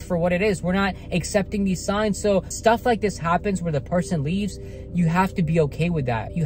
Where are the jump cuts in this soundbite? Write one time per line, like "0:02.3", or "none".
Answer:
0:02.5